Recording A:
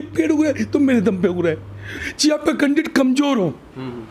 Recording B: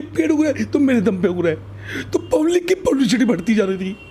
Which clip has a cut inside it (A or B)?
A